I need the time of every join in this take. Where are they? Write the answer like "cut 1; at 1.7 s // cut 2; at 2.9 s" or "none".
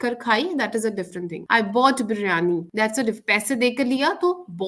cut 1; at 1.4 s // cut 2; at 2.7 s